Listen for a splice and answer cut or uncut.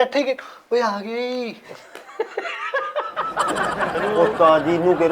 cut